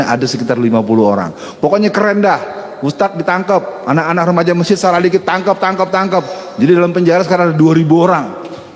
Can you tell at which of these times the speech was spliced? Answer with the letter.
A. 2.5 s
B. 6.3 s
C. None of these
C